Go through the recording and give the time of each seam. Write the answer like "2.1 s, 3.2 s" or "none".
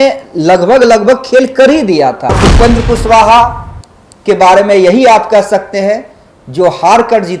2.4 s